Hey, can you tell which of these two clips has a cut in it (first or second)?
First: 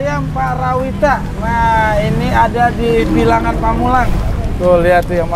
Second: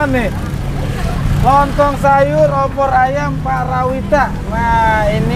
first